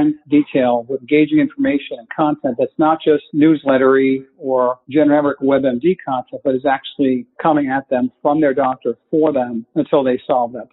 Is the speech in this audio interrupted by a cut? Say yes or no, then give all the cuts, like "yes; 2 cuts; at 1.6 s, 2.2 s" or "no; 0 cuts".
no; 0 cuts